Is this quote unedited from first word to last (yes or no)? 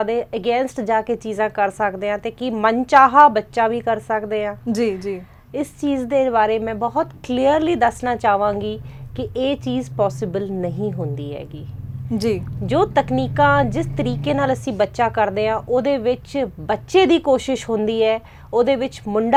yes